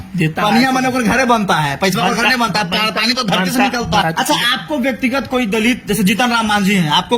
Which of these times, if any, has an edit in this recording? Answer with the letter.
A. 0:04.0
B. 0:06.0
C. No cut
A